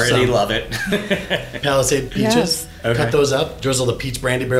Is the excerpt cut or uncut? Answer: cut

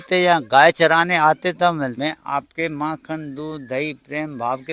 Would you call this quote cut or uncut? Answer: cut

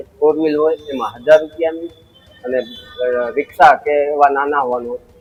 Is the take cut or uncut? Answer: uncut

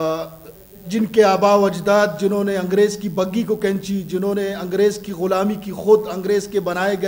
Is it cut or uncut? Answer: uncut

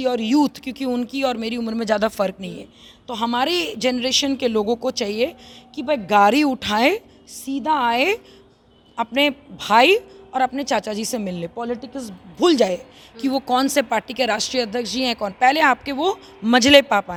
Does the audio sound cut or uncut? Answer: uncut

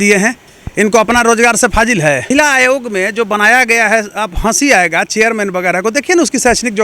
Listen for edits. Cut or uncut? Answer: cut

